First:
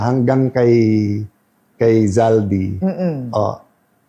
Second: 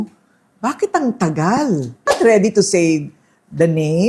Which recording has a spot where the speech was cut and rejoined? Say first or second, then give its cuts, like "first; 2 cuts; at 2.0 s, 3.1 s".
second; 1 cut; at 2.1 s